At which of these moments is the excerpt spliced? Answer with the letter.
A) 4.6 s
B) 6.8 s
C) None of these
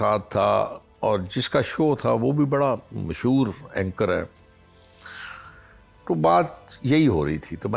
C